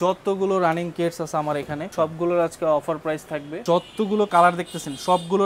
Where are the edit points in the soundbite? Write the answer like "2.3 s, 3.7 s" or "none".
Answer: 1.8 s, 3.6 s

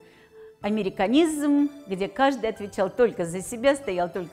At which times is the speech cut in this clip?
none

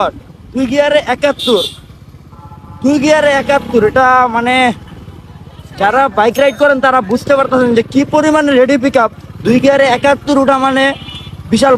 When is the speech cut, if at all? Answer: none

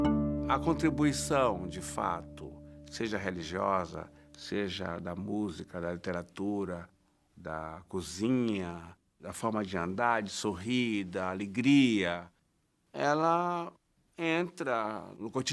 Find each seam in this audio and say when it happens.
10.5 s

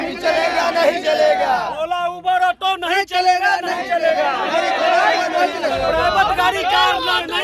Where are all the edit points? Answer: none

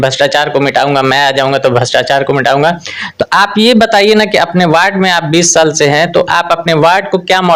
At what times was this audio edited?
none

